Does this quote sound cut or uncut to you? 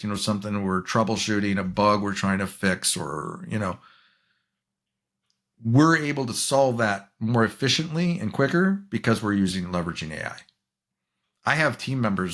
uncut